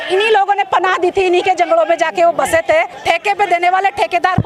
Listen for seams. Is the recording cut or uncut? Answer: cut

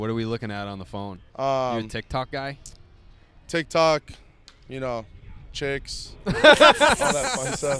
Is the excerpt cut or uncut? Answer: cut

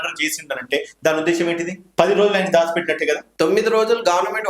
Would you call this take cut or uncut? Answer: cut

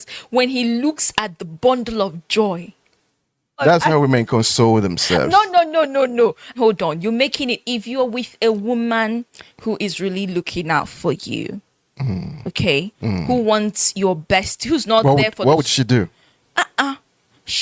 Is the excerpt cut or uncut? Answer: uncut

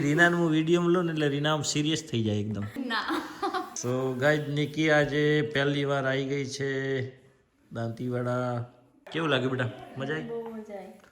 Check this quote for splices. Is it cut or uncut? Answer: uncut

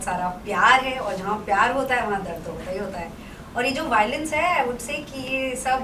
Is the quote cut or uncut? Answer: uncut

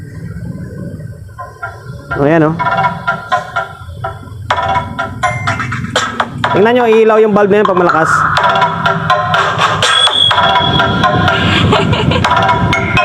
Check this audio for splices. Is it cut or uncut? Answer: uncut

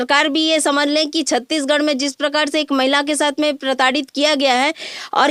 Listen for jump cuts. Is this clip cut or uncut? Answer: uncut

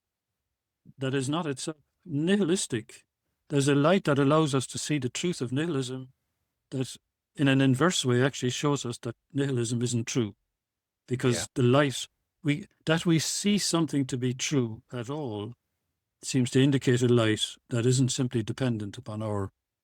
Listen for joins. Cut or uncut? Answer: uncut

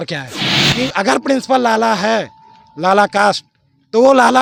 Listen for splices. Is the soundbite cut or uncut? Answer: uncut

